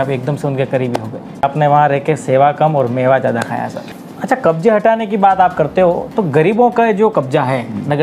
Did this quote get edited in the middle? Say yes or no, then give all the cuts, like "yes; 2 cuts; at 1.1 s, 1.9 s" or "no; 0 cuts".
yes; 2 cuts; at 1.4 s, 4.1 s